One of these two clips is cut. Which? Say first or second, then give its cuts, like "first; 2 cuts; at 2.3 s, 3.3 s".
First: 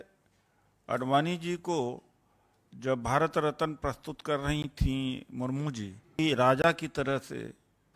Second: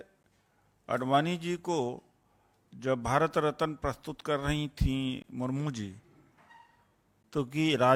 first; 1 cut; at 6.2 s